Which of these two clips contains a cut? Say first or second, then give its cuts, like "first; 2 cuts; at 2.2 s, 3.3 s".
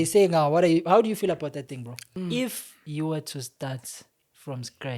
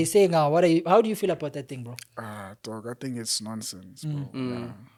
first; 1 cut; at 2.0 s